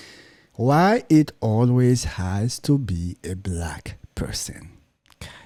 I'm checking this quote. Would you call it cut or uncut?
uncut